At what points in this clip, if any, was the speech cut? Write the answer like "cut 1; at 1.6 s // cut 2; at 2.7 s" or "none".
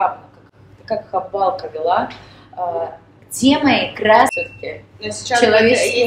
cut 1; at 4.4 s